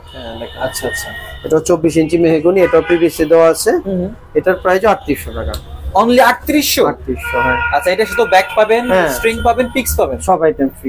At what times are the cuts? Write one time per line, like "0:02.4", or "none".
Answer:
none